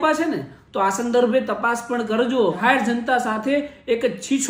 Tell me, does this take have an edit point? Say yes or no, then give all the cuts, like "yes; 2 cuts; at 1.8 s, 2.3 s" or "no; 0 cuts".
yes; 1 cut; at 2.6 s